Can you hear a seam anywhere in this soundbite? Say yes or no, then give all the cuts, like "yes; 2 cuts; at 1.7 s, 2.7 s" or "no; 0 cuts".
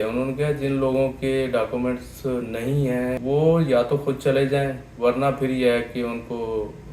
yes; 1 cut; at 3.2 s